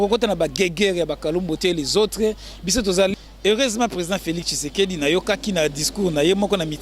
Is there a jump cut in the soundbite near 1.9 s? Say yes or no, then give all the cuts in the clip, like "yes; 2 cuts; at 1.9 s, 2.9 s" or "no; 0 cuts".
no; 1 cut; at 3.1 s